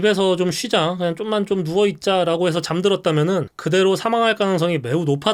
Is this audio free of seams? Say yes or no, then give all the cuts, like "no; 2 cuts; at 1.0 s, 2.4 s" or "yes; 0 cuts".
yes; 0 cuts